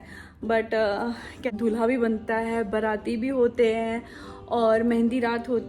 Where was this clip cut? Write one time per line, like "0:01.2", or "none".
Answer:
0:01.4